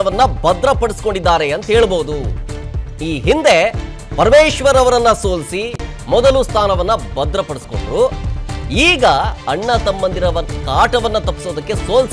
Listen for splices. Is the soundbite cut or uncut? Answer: uncut